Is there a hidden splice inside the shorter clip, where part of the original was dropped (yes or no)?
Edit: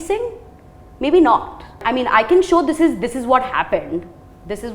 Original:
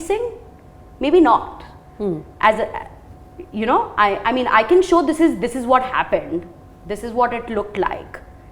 yes